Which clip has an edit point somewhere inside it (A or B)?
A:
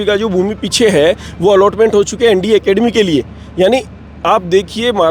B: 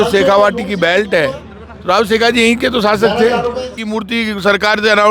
B